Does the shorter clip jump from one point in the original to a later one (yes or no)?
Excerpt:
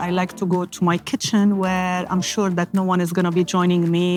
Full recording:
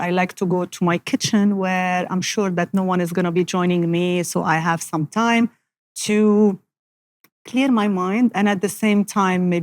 no